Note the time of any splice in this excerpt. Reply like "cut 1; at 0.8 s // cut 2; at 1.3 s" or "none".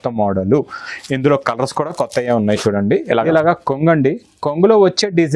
cut 1; at 3.3 s